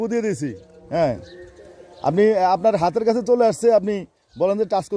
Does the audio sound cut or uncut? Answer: uncut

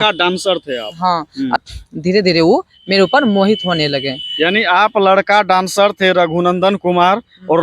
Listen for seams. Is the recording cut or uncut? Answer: cut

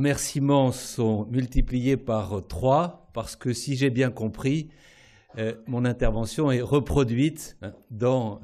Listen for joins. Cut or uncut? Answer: cut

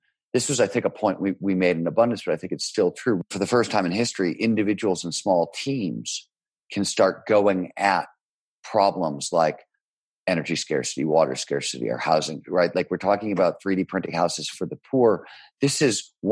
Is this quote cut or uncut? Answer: cut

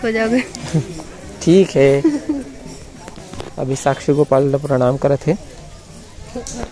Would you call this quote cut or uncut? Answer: uncut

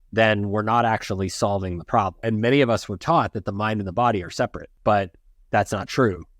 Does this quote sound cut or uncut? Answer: cut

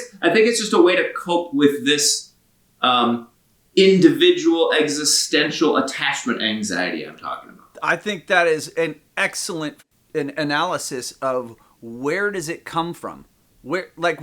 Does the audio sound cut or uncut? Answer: cut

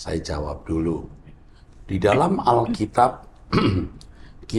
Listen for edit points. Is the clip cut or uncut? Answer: uncut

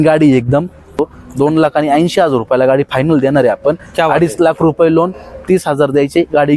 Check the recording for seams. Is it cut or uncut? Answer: cut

